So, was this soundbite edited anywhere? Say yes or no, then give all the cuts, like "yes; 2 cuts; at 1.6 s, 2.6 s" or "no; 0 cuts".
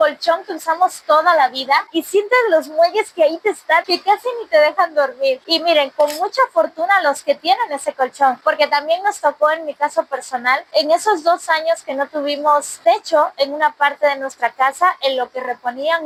no; 0 cuts